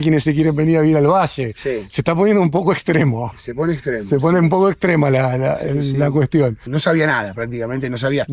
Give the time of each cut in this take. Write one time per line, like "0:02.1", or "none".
0:06.6